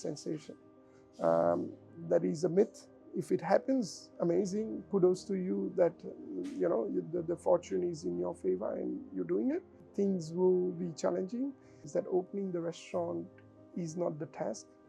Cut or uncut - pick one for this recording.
cut